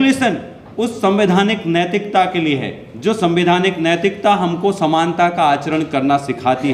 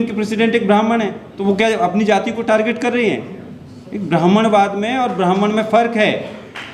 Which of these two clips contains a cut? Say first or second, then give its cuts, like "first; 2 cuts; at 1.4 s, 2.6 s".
second; 1 cut; at 1.3 s